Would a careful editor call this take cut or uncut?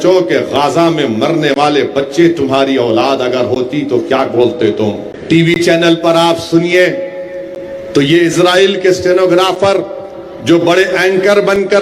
cut